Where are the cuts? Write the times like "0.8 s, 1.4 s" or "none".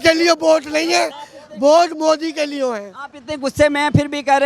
none

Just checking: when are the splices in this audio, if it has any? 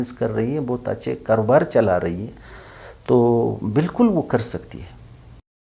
none

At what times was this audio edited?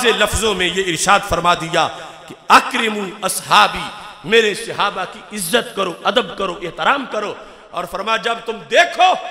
none

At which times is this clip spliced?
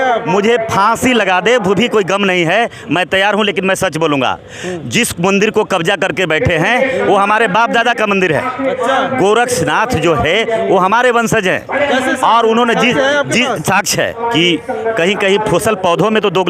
14.2 s

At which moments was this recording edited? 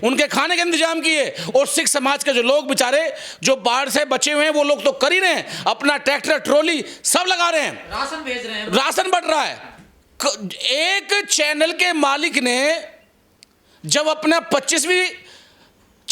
none

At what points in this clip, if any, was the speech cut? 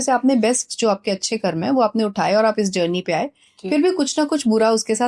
none

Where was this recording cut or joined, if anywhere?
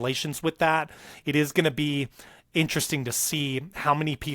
none

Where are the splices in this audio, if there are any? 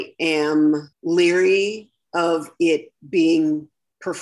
0.9 s

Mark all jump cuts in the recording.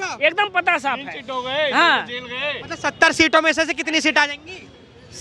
none

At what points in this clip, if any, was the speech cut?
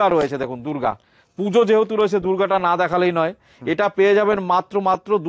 none

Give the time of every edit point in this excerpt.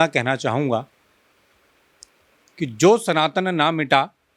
none

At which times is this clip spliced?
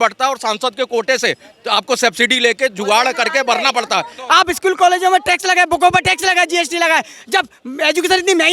4.2 s

